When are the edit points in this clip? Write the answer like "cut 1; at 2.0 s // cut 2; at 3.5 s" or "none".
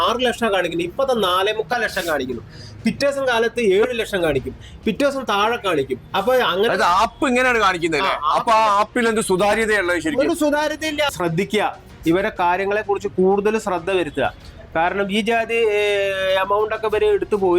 cut 1; at 11.1 s